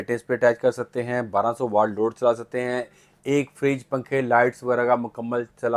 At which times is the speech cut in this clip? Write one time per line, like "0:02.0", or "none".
none